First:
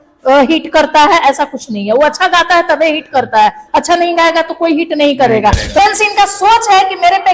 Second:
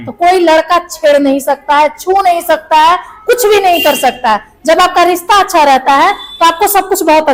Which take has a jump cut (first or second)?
first